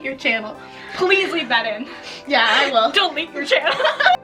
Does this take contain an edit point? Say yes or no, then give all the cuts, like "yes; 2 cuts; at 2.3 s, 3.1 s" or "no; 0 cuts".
no; 0 cuts